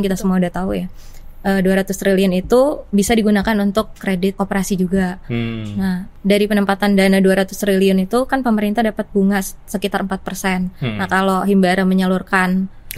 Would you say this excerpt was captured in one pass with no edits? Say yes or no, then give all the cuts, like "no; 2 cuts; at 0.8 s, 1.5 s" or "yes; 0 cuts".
yes; 0 cuts